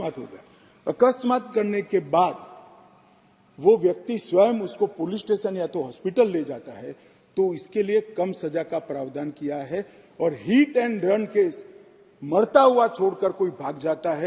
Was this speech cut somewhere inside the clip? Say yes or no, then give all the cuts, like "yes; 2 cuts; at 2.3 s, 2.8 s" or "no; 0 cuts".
no; 0 cuts